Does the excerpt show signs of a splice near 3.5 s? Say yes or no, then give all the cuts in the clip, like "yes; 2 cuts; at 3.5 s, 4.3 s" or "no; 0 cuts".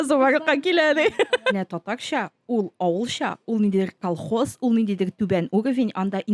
no; 1 cut; at 1.5 s